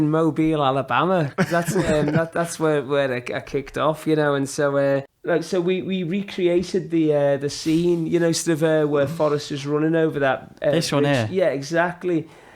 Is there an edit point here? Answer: yes; 1 cut; at 5.1 s

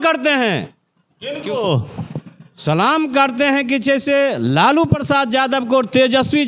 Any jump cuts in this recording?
no; 0 cuts

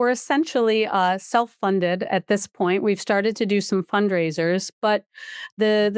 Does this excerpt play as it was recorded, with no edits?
yes; 0 cuts

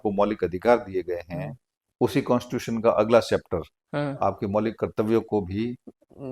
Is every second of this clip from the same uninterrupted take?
yes; 0 cuts

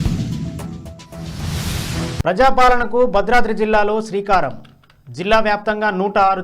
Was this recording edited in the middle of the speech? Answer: yes; 1 cut; at 2.2 s

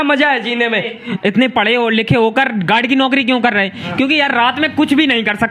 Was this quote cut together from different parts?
yes; 1 cut; at 0.9 s

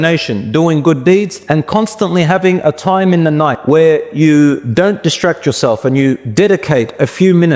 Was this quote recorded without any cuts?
no; 4 cuts; at 1.4 s, 3.6 s, 4.6 s, 6.2 s

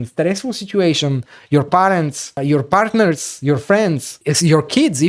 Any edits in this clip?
yes; 2 cuts; at 2.3 s, 4.2 s

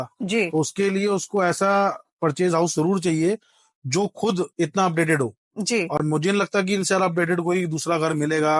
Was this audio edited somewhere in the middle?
no; 0 cuts

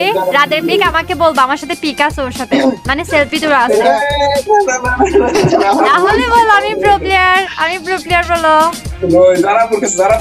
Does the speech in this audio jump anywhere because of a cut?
yes; 1 cut; at 8.9 s

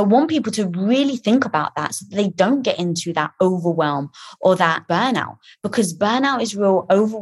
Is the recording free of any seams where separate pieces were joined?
no; 1 cut; at 4.8 s

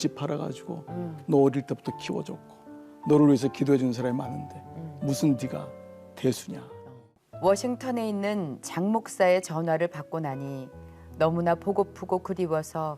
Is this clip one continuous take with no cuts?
no; 1 cut; at 7.2 s

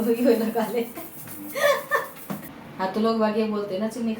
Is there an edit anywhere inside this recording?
yes; 1 cut; at 2.4 s

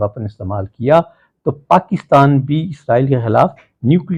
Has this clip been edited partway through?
no; 0 cuts

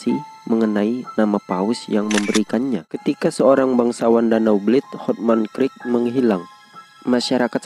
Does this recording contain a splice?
yes; 1 cut; at 2.9 s

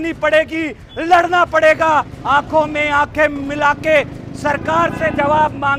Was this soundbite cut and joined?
no; 0 cuts

